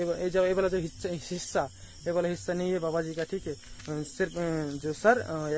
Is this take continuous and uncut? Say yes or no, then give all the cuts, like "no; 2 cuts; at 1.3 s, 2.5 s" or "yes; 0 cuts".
yes; 0 cuts